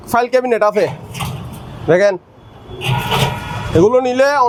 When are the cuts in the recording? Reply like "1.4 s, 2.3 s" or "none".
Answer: none